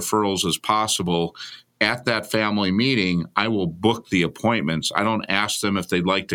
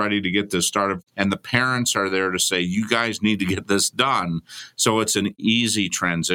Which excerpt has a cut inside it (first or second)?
second